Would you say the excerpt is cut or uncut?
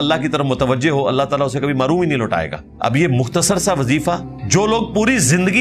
cut